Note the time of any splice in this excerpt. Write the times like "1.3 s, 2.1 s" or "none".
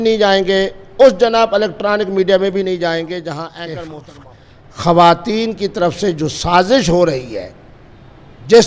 4.1 s